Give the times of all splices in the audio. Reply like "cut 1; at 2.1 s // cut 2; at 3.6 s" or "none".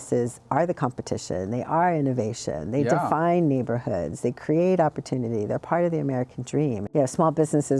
cut 1; at 6.8 s